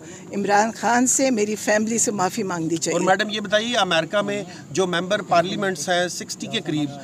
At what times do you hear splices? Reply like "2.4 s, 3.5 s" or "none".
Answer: none